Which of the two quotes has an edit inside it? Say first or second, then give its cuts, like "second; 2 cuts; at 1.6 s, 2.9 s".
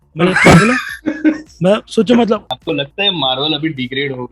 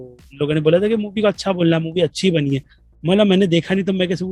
first; 1 cut; at 2.5 s